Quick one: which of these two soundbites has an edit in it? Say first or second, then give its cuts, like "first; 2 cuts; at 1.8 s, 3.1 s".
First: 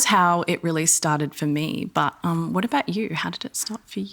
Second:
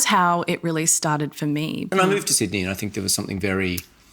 second; 1 cut; at 1.9 s